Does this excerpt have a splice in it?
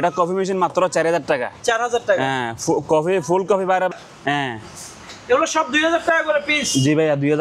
yes; 1 cut; at 3.9 s

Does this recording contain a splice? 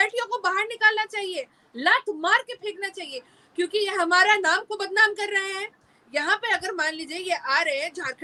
no; 0 cuts

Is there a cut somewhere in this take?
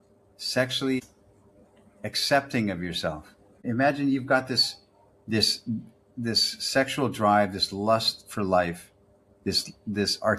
yes; 2 cuts; at 1.0 s, 3.6 s

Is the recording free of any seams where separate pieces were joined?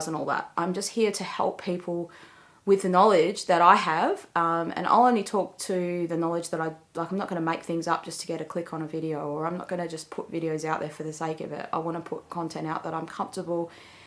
yes; 0 cuts

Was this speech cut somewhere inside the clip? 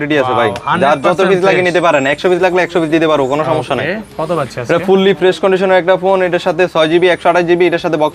no; 0 cuts

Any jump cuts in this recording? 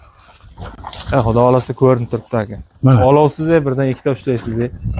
no; 0 cuts

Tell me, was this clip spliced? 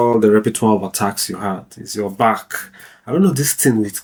no; 0 cuts

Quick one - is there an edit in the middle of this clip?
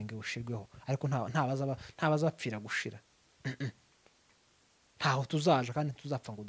no; 0 cuts

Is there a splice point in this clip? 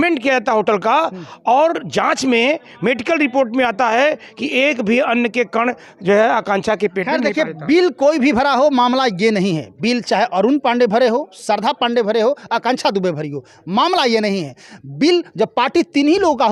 no; 0 cuts

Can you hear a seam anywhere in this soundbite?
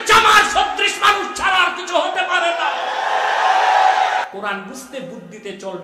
yes; 1 cut; at 4.2 s

